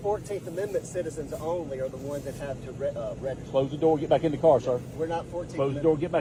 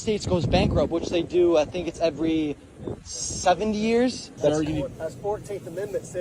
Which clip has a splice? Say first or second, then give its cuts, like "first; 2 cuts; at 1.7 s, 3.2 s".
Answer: second; 1 cut; at 4.3 s